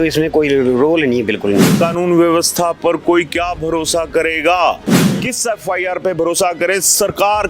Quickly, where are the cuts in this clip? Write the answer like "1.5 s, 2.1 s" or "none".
1.7 s, 5.1 s